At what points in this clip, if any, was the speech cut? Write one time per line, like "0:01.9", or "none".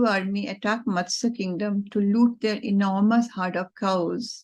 none